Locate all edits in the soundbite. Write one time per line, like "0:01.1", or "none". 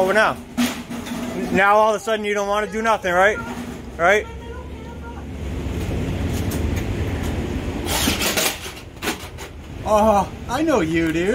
none